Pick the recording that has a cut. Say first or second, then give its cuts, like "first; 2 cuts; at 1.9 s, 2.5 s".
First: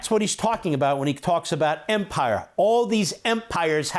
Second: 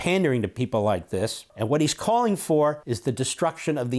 second; 2 cuts; at 1.5 s, 2.9 s